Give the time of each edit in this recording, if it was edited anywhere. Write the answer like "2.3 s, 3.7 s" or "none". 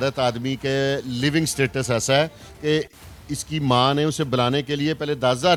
none